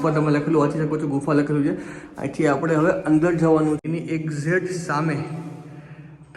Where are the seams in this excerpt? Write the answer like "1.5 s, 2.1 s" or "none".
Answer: 3.8 s